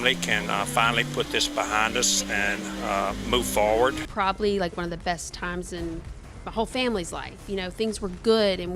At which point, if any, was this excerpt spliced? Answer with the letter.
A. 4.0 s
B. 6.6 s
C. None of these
A